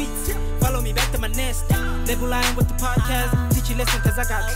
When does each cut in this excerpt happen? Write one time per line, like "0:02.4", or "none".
none